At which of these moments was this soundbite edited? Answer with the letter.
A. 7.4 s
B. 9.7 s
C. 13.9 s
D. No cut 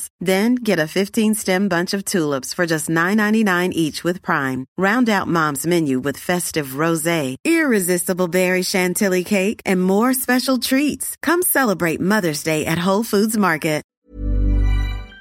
C